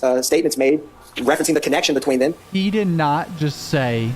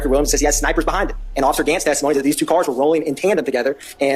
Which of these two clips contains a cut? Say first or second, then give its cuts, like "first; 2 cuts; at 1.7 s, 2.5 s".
first; 1 cut; at 2.4 s